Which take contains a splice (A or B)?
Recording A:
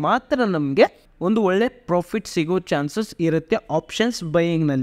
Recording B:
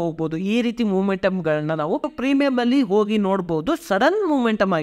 B